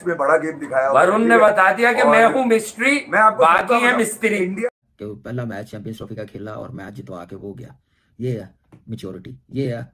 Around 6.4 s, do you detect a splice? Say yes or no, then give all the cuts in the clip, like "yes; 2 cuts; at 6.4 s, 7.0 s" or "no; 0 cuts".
no; 1 cut; at 4.6 s